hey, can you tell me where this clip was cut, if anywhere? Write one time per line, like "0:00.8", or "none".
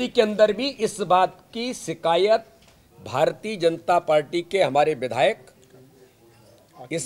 none

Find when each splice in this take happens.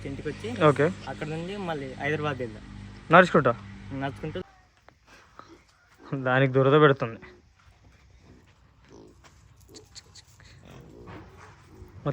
0:04.4

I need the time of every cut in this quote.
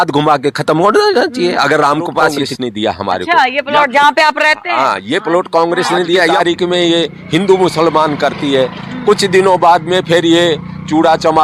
0:02.4
0:06.3

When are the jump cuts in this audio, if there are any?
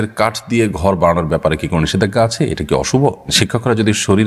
0:03.3

